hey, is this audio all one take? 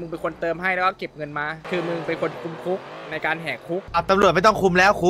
no; 2 cuts; at 1.6 s, 3.9 s

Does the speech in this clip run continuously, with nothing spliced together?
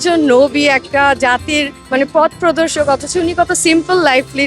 no; 1 cut; at 1.8 s

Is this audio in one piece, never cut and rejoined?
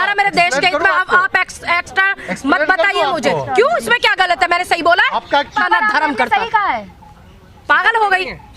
no; 1 cut; at 5.6 s

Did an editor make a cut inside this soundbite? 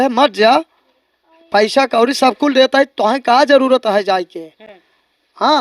no; 0 cuts

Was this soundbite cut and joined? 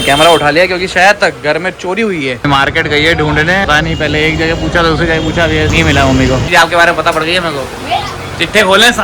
yes; 4 cuts; at 2.4 s, 3.7 s, 5.7 s, 6.5 s

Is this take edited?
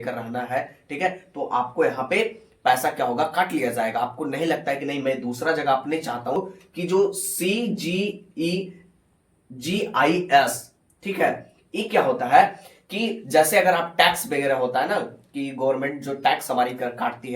yes; 1 cut; at 6.4 s

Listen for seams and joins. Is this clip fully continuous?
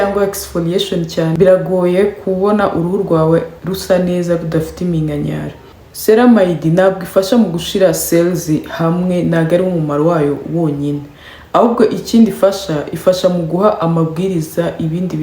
no; 1 cut; at 5.8 s

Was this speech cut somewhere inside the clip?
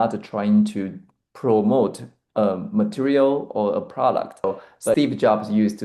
yes; 1 cut; at 4.9 s

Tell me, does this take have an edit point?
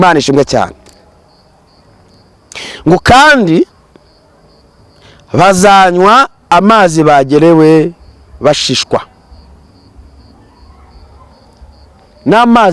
no; 0 cuts

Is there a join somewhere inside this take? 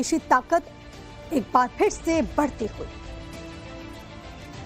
yes; 1 cut; at 3.1 s

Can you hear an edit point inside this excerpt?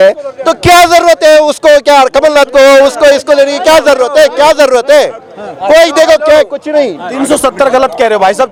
no; 0 cuts

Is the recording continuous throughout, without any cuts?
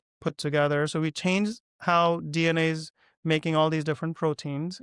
yes; 0 cuts

